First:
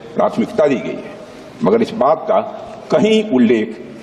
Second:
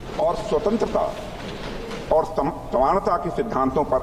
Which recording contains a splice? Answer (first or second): second